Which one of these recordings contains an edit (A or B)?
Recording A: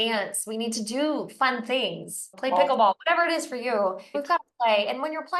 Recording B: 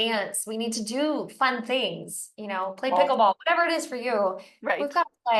A